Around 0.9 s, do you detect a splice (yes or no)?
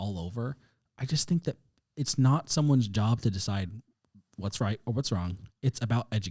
no